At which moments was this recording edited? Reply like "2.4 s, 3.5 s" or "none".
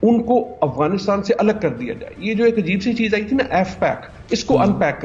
none